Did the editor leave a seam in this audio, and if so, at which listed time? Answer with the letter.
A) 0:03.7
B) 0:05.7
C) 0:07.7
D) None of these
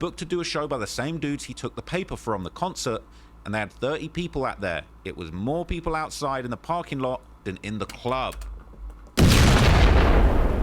D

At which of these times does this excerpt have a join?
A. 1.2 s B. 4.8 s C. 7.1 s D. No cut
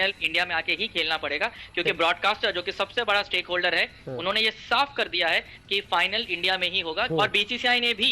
C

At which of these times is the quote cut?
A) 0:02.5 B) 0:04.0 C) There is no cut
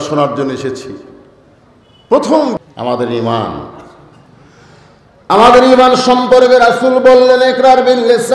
A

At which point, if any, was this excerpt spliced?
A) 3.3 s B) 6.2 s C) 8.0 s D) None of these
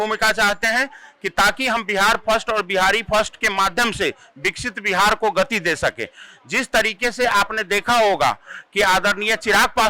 D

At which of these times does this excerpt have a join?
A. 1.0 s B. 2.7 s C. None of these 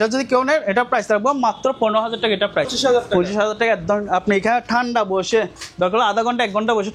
B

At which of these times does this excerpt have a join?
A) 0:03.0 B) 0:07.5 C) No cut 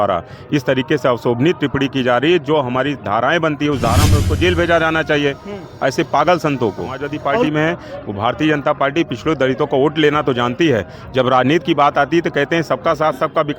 B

